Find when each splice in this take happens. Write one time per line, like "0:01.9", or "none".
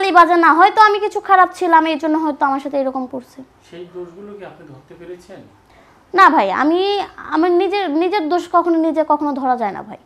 none